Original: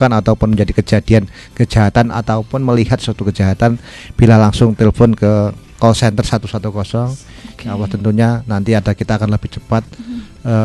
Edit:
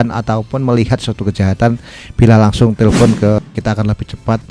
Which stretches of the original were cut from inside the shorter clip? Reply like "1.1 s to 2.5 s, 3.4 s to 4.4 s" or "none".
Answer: 5.4 s to 8.8 s